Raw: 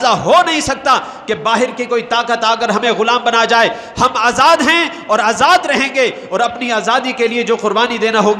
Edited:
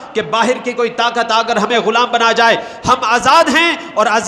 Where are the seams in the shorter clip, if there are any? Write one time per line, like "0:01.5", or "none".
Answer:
none